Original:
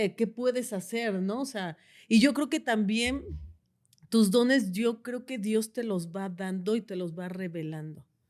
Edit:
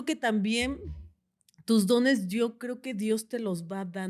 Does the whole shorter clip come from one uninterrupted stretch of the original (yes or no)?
yes